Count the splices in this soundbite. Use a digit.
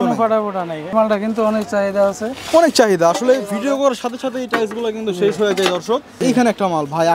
2